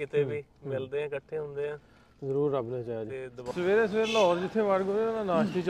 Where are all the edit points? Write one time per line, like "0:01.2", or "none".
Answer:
0:03.4